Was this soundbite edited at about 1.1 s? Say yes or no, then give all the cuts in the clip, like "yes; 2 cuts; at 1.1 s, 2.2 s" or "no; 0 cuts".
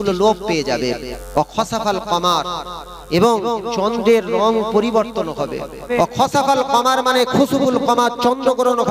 yes; 2 cuts; at 1.1 s, 5.8 s